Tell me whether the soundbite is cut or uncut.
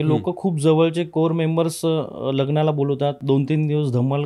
cut